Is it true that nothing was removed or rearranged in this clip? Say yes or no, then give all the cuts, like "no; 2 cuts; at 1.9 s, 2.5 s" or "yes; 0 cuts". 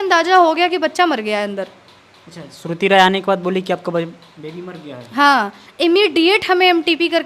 yes; 0 cuts